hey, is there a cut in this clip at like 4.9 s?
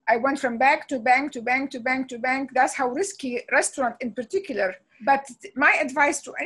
yes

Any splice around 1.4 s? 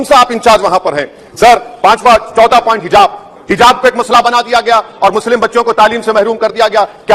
no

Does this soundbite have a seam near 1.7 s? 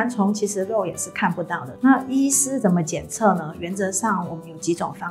yes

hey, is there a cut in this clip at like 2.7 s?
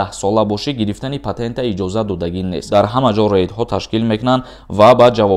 yes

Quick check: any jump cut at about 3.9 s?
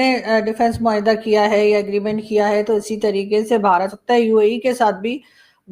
yes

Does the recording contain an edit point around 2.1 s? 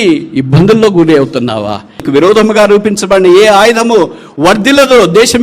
yes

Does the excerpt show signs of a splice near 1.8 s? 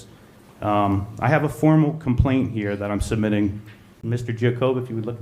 no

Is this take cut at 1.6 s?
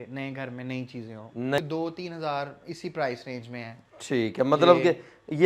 yes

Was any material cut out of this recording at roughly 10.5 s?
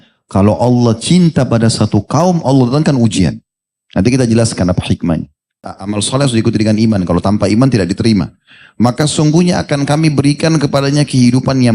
no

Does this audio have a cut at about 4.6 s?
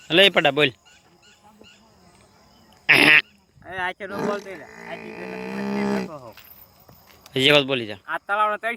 no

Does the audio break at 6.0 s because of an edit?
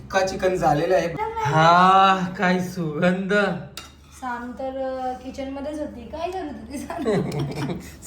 no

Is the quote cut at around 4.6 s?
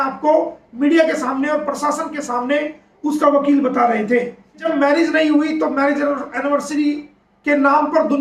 yes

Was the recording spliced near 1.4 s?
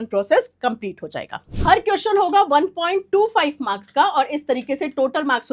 yes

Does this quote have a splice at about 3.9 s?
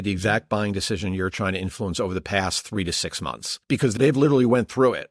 yes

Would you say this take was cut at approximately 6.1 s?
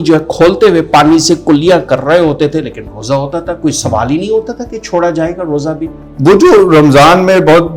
yes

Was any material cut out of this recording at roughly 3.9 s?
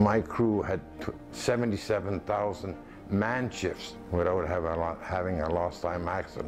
yes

